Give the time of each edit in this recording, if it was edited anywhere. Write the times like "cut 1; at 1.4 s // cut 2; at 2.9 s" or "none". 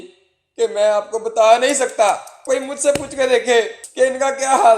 cut 1; at 2.4 s // cut 2; at 3.8 s